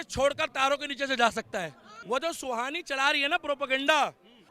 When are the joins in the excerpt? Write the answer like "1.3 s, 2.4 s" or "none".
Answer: 1.9 s